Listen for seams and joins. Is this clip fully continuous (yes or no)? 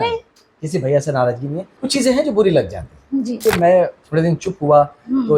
no